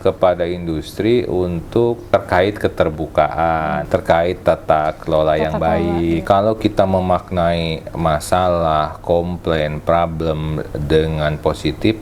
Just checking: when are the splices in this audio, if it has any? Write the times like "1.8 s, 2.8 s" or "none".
2.0 s, 3.8 s, 6.2 s

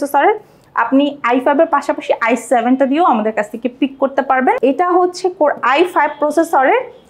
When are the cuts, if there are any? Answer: 4.6 s

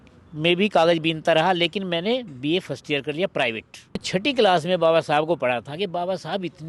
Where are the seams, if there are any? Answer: 4.0 s

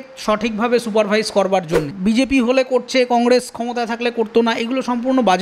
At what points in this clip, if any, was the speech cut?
1.9 s

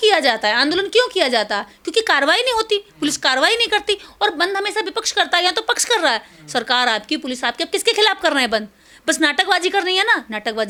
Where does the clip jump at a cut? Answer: none

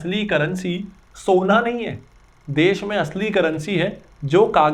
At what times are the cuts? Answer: none

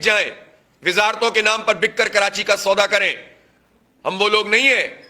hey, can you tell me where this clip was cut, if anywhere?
none

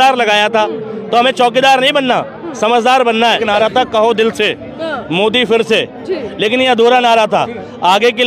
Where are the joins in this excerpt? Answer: 3.4 s

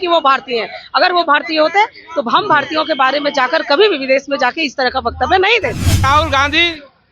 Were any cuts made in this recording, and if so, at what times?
6.0 s

